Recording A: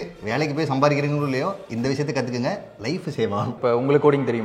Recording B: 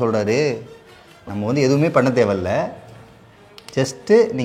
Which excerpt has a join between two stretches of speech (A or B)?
A